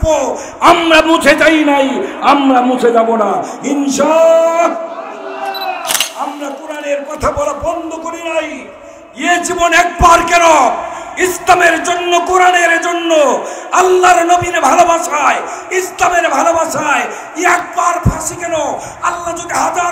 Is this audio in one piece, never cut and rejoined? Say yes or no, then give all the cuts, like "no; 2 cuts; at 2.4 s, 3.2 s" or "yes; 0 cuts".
no; 1 cut; at 6.1 s